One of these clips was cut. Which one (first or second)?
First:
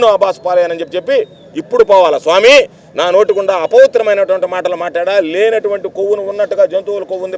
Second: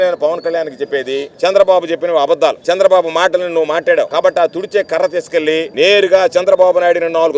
second